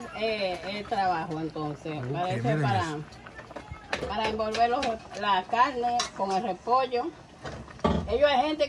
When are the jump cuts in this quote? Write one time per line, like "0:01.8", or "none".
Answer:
none